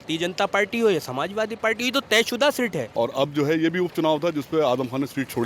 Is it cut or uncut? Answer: cut